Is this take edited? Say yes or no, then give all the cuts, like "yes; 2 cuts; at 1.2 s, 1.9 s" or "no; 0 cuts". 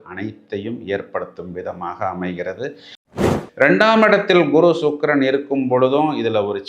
yes; 1 cut; at 3.0 s